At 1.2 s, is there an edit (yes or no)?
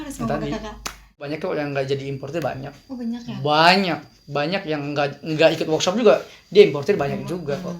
yes